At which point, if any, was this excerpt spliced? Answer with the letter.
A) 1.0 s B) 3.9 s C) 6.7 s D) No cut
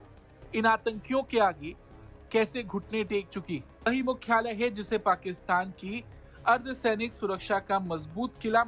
B